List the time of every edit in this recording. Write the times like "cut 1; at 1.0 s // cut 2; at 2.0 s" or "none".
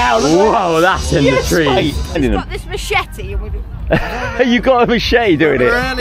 cut 1; at 2.0 s